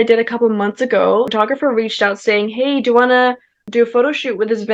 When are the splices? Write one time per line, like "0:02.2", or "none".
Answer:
0:01.3